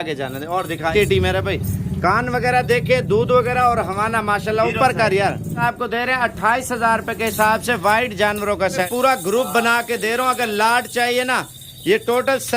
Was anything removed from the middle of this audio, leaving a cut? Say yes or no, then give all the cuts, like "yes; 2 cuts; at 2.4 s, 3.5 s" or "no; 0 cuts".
yes; 3 cuts; at 0.9 s, 5.6 s, 8.9 s